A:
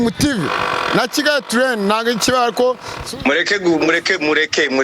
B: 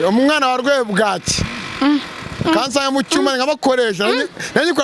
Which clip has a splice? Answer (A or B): A